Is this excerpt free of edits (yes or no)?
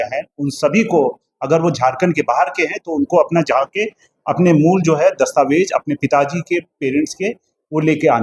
yes